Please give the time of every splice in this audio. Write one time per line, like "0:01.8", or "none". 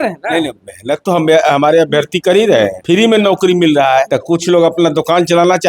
0:02.8
0:04.1

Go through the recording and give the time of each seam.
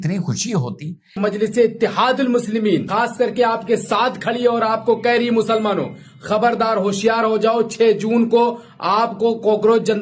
0:01.2

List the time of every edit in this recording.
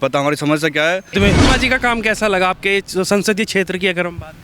0:01.1

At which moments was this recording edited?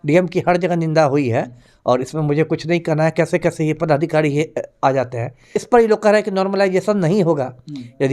0:05.6

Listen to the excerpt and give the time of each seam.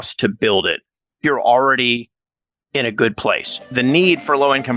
0:01.2
0:03.6

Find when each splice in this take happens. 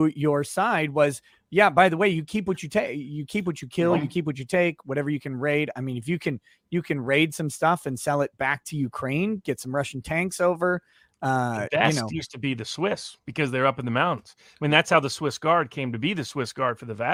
none

